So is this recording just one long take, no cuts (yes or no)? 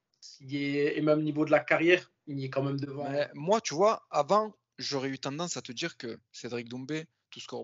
no